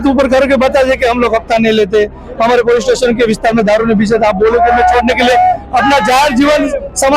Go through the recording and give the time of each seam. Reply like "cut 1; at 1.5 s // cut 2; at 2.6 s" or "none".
none